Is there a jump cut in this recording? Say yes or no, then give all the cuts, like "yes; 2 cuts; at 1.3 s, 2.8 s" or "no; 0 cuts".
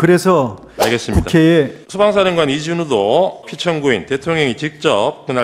yes; 2 cuts; at 1.8 s, 3.5 s